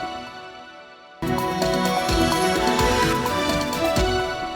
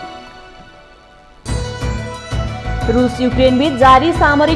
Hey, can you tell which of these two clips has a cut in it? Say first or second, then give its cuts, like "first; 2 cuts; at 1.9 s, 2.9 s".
first; 1 cut; at 1.5 s